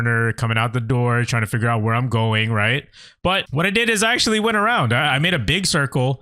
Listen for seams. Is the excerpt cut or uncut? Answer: cut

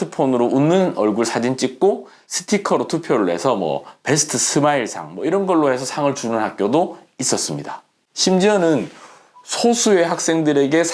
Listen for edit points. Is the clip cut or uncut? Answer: uncut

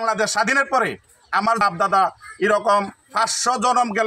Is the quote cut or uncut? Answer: cut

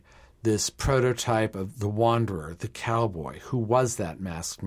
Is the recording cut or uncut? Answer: uncut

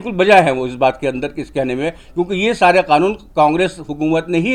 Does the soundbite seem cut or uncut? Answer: uncut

